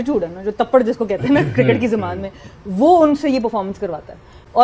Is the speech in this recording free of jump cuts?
yes; 0 cuts

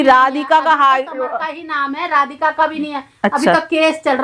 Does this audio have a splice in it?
no; 0 cuts

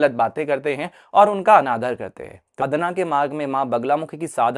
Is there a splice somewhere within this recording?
yes; 1 cut; at 2.6 s

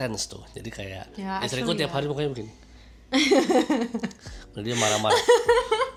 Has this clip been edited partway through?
no; 0 cuts

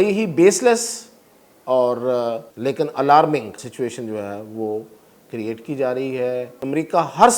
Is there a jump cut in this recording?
yes; 3 cuts; at 2.5 s, 3.6 s, 6.5 s

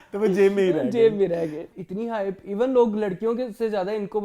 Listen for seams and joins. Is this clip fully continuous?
no; 1 cut; at 1.8 s

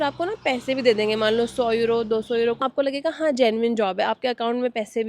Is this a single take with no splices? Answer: no; 1 cut; at 2.6 s

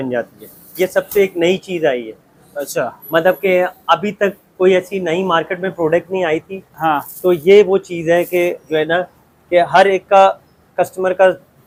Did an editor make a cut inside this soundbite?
no; 0 cuts

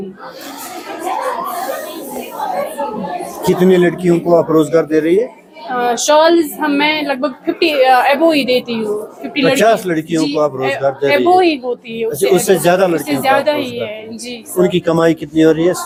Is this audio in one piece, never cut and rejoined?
yes; 0 cuts

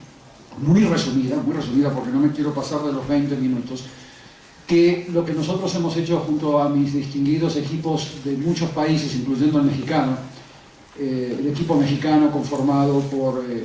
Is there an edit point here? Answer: no; 0 cuts

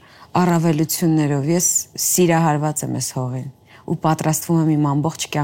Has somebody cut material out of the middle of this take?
no; 0 cuts

